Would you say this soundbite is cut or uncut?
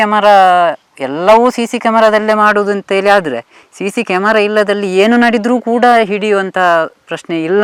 uncut